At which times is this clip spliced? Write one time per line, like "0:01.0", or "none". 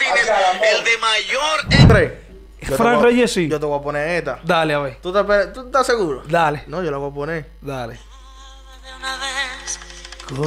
0:01.9